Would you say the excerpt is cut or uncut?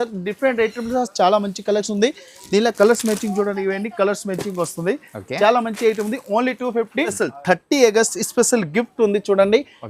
cut